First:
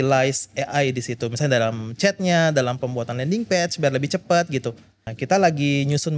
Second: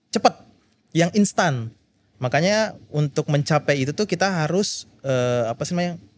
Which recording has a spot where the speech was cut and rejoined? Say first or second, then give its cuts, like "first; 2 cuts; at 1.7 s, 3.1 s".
first; 1 cut; at 5.0 s